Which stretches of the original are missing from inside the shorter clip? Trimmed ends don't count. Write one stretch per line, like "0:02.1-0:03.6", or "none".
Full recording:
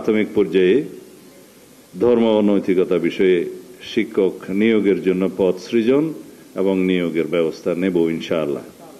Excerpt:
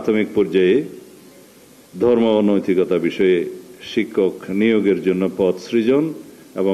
none